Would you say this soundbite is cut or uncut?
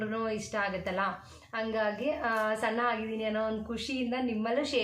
uncut